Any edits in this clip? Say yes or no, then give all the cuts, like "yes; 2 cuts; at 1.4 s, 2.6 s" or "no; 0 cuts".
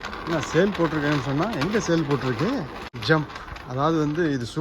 yes; 1 cut; at 2.8 s